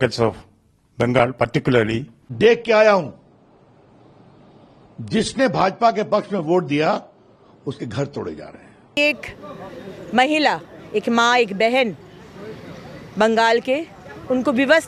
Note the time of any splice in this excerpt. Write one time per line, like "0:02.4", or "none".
0:02.2
0:09.0